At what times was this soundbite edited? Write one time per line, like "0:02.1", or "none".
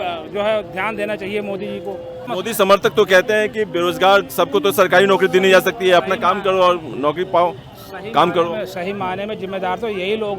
0:02.3